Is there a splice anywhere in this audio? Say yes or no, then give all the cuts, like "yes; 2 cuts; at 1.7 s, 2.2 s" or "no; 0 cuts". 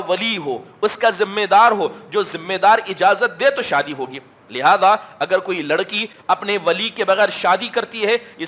yes; 1 cut; at 6.1 s